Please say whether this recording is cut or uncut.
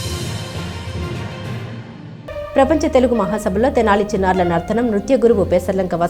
cut